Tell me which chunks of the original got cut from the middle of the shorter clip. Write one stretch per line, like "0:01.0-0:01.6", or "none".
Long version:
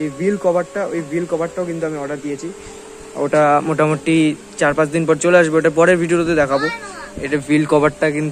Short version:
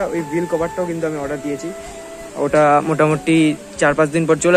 none